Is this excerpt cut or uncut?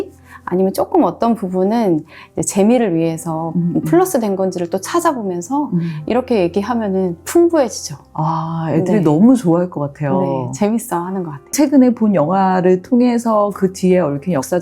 cut